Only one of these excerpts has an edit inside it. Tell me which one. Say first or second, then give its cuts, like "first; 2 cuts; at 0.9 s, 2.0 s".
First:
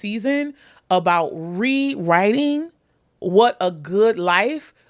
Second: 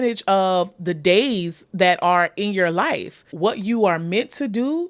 second; 1 cut; at 3.3 s